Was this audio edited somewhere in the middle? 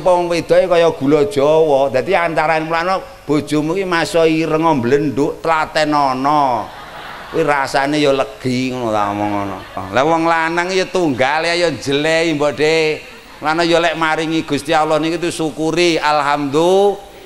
yes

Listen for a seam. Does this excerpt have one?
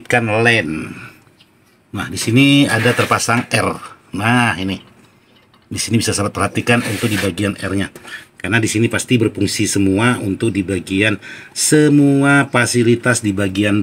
no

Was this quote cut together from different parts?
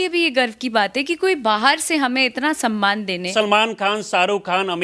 yes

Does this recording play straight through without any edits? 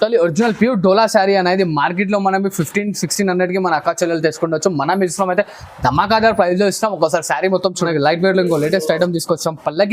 no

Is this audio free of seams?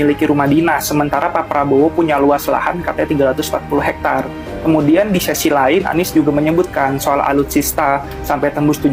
yes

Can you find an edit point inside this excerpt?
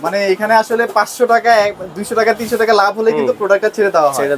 no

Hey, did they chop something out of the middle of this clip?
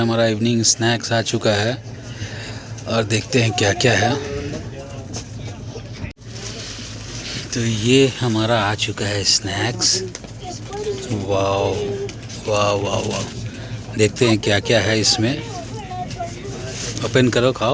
no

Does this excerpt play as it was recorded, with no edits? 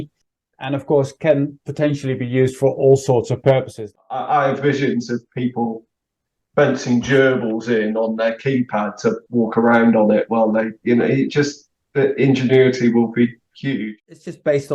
no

